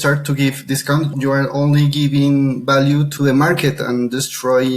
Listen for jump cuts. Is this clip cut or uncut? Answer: cut